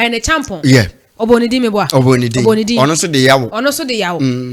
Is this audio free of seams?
yes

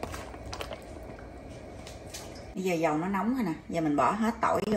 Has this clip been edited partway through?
yes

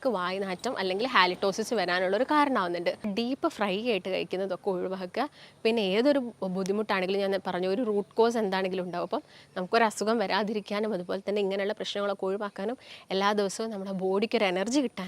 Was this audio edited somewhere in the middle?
yes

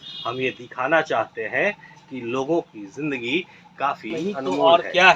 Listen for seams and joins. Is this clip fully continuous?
no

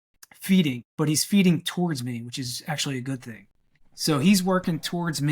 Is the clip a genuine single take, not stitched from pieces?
no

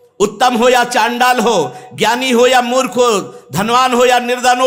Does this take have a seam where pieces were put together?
no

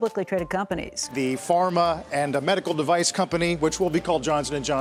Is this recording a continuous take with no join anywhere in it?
yes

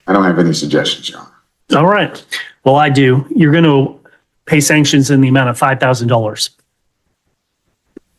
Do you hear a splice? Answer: no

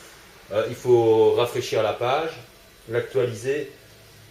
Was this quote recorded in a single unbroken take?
no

